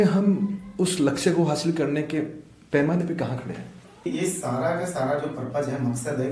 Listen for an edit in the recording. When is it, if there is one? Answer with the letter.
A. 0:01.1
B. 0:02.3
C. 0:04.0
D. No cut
C